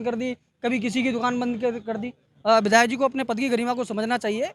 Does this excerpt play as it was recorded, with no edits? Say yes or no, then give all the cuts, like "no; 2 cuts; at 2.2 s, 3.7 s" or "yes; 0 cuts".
yes; 0 cuts